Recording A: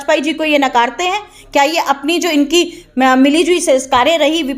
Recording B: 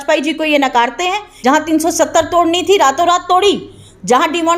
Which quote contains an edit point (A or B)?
B